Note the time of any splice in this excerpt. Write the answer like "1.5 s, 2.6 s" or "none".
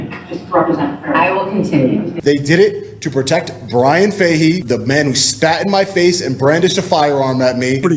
2.1 s, 4.6 s